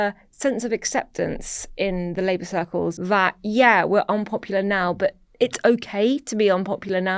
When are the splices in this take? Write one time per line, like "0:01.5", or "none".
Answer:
0:03.0